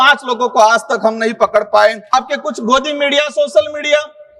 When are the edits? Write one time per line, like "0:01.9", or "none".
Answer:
0:02.1